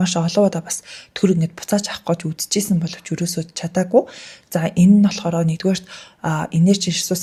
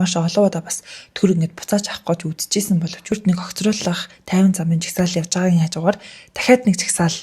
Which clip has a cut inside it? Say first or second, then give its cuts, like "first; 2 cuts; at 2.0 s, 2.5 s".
second; 1 cut; at 3.1 s